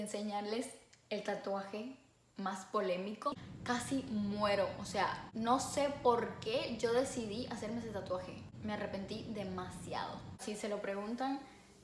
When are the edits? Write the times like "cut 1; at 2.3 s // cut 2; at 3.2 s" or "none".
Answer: cut 1; at 3.5 s // cut 2; at 5.2 s // cut 3; at 8.5 s // cut 4; at 10.4 s